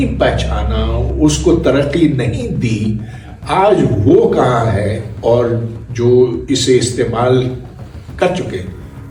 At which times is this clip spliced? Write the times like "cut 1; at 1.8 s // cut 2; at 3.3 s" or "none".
none